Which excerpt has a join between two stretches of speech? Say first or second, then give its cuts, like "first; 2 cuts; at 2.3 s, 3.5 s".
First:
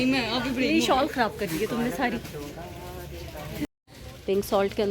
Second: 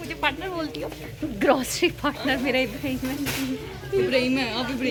first; 1 cut; at 3.8 s